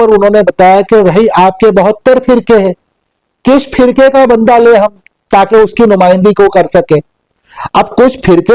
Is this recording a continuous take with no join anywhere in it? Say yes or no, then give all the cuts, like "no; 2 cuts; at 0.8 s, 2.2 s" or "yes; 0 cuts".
yes; 0 cuts